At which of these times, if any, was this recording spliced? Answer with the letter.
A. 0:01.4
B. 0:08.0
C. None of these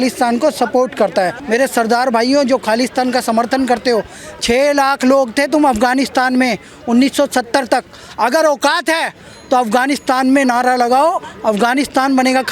A